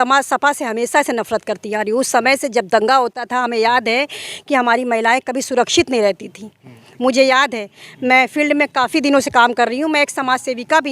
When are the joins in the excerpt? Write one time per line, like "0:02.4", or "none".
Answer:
none